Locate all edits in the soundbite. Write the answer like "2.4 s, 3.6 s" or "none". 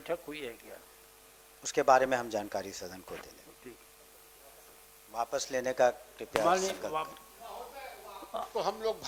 none